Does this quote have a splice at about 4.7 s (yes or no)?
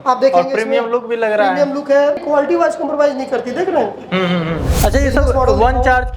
yes